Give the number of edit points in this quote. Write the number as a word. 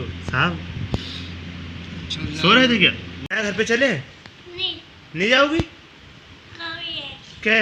one